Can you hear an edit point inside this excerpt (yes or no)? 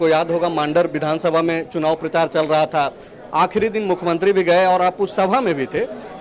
no